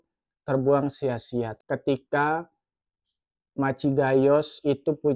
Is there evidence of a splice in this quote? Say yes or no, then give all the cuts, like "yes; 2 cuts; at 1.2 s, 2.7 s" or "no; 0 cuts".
yes; 1 cut; at 1.6 s